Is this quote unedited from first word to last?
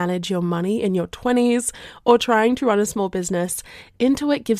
yes; 0 cuts

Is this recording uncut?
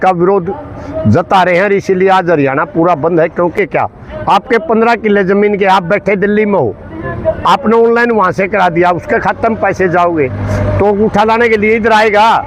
no; 1 cut; at 3.6 s

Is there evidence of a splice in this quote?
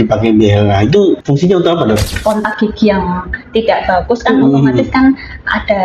yes; 2 cuts; at 1.2 s, 2.1 s

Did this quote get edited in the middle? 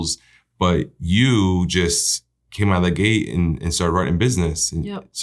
no; 0 cuts

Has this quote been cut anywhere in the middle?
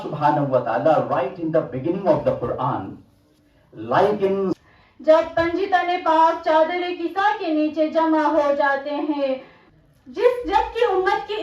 yes; 2 cuts; at 4.6 s, 9.6 s

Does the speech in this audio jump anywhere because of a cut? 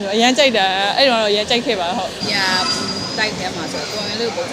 yes; 1 cut; at 2.2 s

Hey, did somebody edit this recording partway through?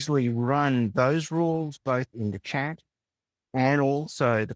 no; 0 cuts

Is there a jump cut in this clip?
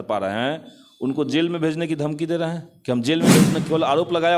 yes; 1 cut; at 3.5 s

